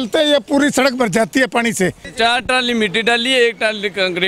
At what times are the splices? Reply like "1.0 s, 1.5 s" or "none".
2.1 s